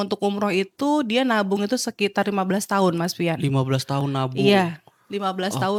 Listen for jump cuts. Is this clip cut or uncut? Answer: uncut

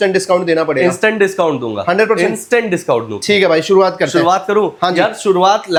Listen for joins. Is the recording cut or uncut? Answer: uncut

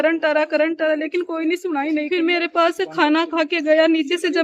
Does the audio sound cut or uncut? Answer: cut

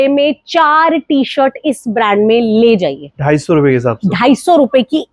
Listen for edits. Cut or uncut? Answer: uncut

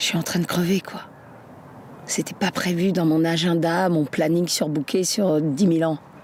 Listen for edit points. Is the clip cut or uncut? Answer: uncut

